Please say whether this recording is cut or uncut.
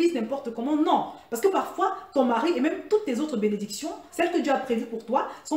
cut